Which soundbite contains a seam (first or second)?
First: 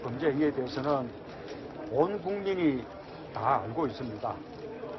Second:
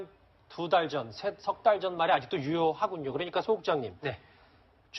second